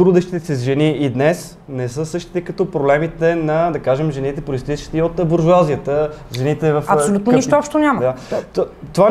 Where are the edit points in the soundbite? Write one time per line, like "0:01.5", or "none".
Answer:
none